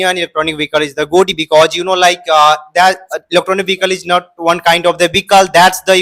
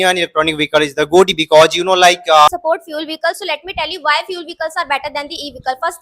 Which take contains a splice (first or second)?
second